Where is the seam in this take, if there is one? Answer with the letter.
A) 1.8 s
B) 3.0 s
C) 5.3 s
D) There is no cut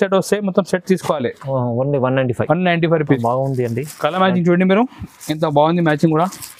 B